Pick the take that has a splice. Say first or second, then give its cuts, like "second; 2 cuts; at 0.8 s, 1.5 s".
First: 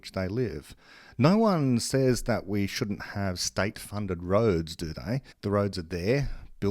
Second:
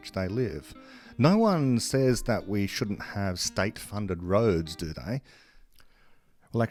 first; 1 cut; at 5.3 s